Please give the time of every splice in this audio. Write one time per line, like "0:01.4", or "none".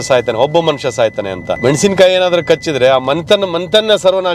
0:01.5